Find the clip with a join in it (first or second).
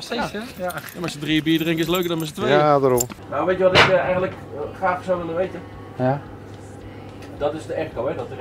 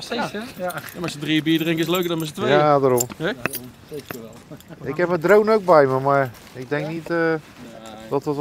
first